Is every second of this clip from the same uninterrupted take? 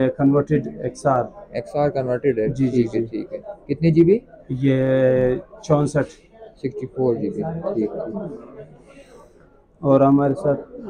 yes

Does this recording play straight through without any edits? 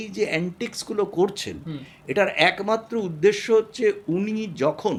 yes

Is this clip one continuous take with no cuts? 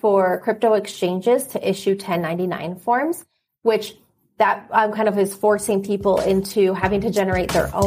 yes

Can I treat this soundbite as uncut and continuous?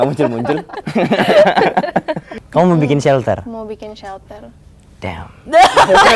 no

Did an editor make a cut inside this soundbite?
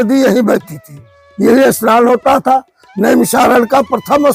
no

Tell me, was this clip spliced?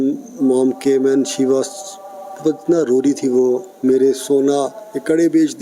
no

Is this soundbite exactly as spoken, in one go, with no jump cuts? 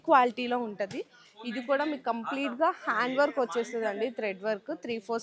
yes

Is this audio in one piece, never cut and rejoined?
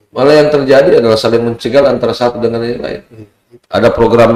yes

